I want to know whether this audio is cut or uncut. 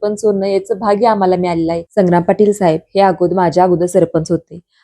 cut